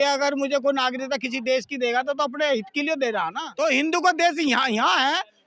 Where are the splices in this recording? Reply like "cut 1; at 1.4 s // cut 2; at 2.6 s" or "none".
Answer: cut 1; at 3.4 s